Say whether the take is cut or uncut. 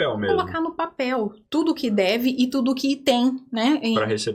uncut